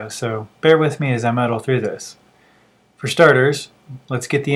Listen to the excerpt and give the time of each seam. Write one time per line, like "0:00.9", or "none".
none